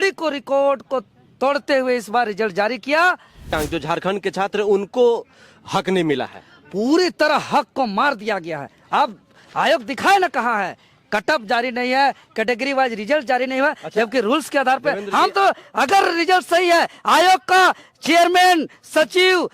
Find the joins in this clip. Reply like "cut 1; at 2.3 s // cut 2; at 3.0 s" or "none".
cut 1; at 3.6 s